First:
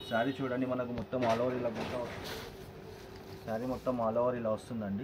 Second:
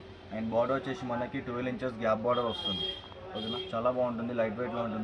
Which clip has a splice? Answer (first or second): first